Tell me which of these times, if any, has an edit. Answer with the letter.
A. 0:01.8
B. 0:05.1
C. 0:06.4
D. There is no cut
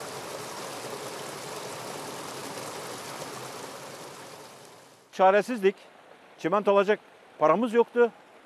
B